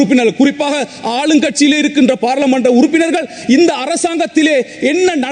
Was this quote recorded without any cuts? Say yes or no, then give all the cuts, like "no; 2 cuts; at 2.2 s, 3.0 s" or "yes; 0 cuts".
yes; 0 cuts